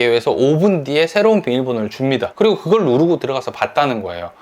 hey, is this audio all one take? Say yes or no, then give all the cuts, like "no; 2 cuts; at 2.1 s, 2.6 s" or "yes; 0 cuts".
no; 1 cut; at 2.3 s